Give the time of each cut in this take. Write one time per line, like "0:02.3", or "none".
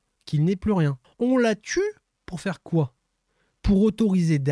0:01.0